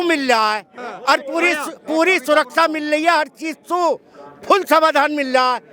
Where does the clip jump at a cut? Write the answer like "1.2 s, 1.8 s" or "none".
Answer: none